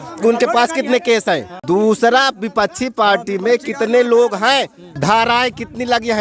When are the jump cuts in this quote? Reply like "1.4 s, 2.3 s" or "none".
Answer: 1.5 s, 4.8 s